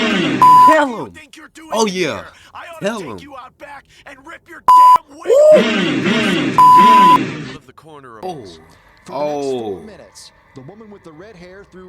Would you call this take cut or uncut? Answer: cut